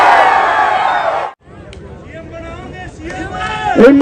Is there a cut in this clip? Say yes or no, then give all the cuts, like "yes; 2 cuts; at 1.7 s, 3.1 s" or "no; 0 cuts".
yes; 1 cut; at 1.3 s